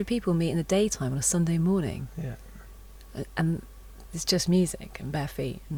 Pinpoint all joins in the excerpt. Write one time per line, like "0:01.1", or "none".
none